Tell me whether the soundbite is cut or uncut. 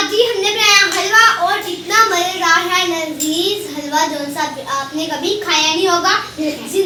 uncut